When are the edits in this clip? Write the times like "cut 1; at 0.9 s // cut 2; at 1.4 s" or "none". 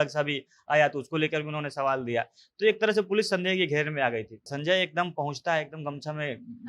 cut 1; at 4.5 s